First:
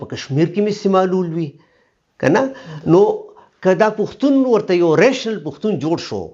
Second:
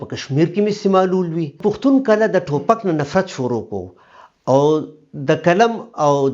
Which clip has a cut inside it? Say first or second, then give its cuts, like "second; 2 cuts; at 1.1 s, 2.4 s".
second; 1 cut; at 1.5 s